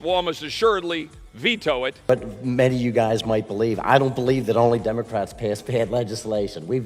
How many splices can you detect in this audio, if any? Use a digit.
1